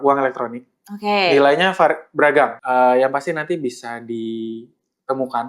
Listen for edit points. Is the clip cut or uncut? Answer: cut